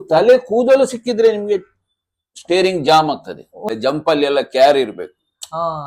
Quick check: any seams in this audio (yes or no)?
yes